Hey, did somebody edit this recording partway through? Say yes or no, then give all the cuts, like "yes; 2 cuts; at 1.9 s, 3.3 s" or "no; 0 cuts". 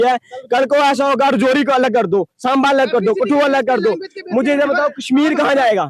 no; 0 cuts